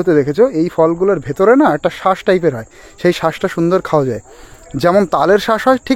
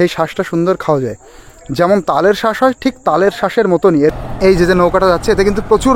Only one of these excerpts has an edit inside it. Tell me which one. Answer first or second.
second